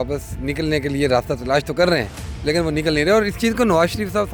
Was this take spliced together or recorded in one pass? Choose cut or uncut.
uncut